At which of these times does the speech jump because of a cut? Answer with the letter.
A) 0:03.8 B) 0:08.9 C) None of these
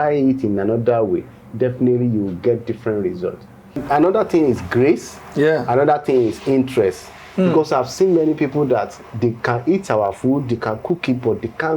A